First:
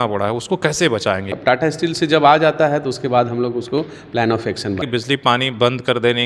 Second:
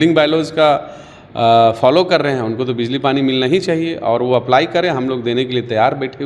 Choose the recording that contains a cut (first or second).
first